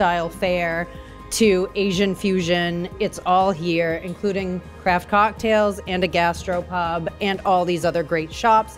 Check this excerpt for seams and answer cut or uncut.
uncut